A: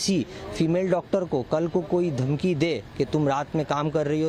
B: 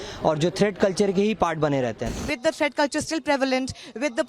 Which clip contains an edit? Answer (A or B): B